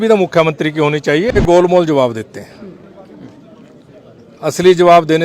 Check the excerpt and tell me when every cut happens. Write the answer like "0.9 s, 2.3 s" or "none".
1.4 s